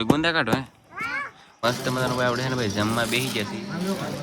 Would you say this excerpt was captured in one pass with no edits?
no; 1 cut; at 1.6 s

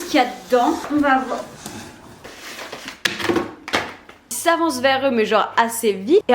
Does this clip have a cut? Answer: yes; 3 cuts; at 0.8 s, 2.4 s, 4.3 s

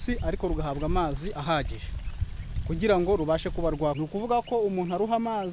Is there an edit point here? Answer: yes; 1 cut; at 4.0 s

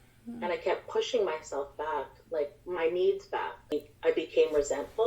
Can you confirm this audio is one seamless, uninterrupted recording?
no; 1 cut; at 3.7 s

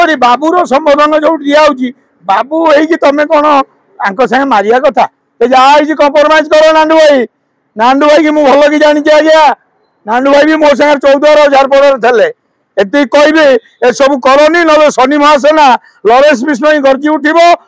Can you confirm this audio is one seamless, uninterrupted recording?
yes; 0 cuts

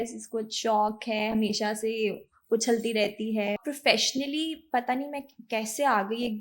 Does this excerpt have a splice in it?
yes; 1 cut; at 3.6 s

